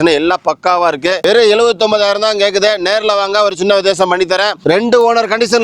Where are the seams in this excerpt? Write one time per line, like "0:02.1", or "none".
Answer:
0:04.6